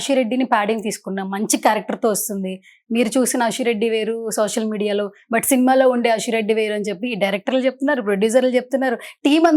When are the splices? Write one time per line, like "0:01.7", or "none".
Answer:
none